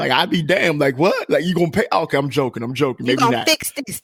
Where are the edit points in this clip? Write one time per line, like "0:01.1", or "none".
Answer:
none